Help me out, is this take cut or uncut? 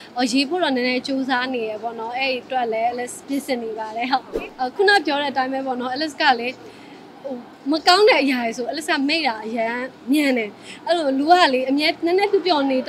cut